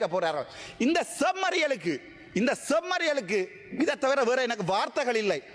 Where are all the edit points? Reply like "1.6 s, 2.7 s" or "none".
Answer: none